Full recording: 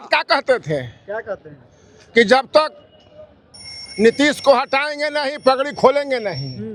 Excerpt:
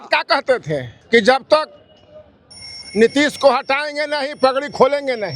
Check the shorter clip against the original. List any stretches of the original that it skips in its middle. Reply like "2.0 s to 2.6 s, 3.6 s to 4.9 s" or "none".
0.9 s to 2.0 s